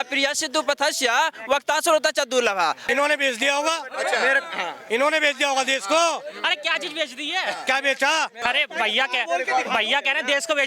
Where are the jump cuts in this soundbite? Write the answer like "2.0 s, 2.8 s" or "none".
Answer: 2.8 s, 8.3 s